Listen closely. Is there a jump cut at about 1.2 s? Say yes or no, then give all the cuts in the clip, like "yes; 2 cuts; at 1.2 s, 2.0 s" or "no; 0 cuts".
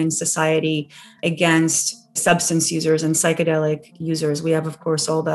yes; 2 cuts; at 1.2 s, 2.2 s